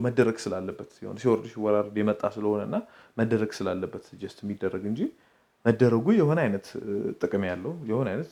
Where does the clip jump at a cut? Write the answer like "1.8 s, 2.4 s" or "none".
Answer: none